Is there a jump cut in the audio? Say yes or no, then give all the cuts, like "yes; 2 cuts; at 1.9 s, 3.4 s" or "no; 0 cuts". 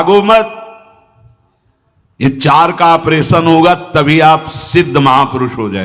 no; 0 cuts